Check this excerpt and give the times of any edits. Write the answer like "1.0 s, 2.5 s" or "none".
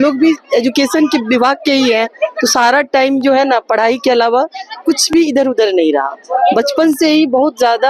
none